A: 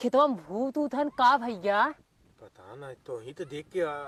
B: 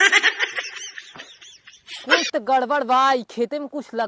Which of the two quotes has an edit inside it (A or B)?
B